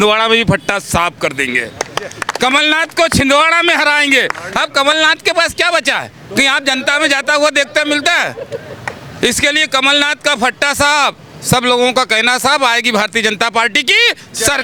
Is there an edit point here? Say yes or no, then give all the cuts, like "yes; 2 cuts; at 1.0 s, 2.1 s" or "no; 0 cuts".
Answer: no; 0 cuts